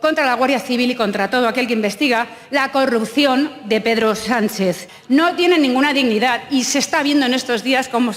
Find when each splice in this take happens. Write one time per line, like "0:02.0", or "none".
0:04.9